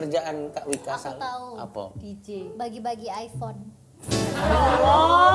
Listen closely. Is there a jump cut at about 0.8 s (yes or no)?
no